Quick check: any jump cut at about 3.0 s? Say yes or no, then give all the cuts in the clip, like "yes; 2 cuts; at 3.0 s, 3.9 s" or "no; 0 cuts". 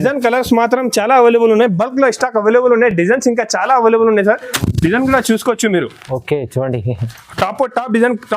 no; 0 cuts